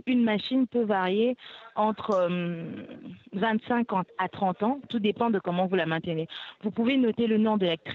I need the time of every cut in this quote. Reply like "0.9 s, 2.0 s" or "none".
none